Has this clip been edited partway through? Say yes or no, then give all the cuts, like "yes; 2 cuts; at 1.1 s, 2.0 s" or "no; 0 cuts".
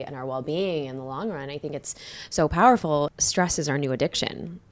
yes; 1 cut; at 3.1 s